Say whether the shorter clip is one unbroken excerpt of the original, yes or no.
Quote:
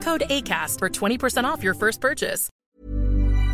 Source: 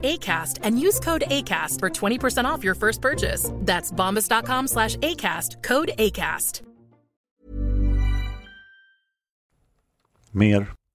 no